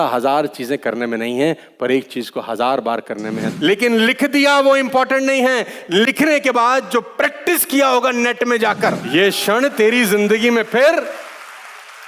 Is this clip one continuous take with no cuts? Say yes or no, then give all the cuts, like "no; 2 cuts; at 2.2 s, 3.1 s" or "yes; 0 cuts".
no; 2 cuts; at 3.5 s, 9.0 s